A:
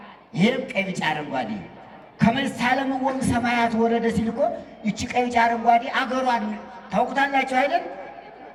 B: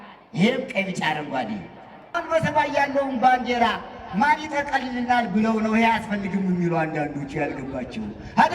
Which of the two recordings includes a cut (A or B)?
B